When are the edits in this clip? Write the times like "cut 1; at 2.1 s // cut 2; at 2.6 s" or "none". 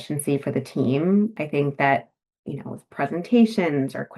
cut 1; at 1.4 s